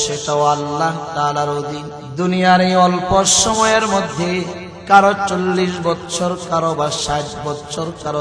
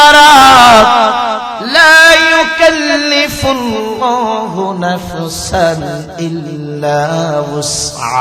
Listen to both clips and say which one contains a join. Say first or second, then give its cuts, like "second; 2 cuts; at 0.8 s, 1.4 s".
first; 2 cuts; at 2.0 s, 4.7 s